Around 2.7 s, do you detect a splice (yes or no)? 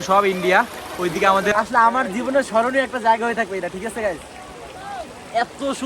no